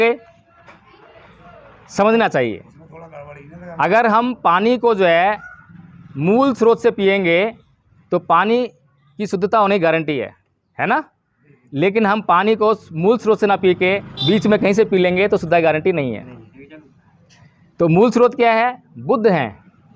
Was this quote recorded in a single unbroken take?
yes; 0 cuts

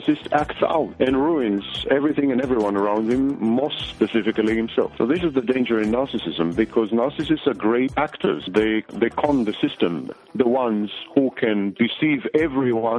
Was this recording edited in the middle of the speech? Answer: yes; 3 cuts; at 0.9 s, 8.8 s, 10.1 s

